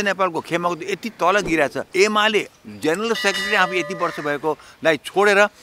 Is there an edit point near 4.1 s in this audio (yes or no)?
no